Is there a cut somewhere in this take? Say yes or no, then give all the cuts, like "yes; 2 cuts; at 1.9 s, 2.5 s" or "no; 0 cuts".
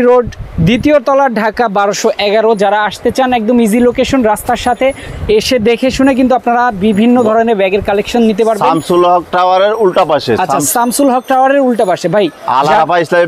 no; 0 cuts